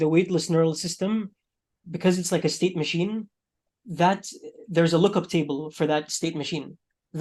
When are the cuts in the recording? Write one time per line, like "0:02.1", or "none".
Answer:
none